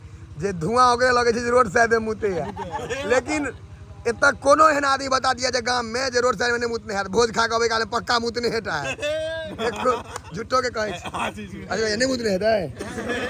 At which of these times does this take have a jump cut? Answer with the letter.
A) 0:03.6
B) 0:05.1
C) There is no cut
C